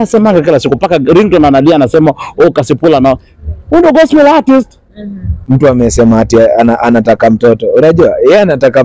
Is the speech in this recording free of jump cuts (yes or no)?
no